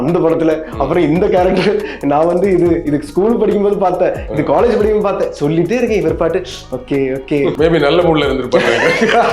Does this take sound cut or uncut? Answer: cut